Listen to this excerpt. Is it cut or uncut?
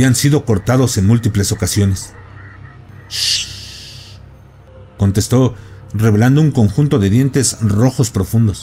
cut